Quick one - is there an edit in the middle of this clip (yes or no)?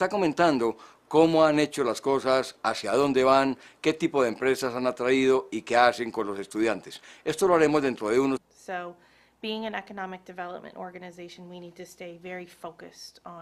no